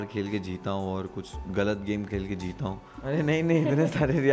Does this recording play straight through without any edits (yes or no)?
no